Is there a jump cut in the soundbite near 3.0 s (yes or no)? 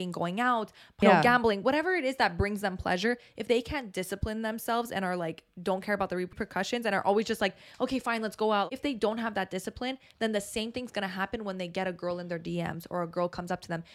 no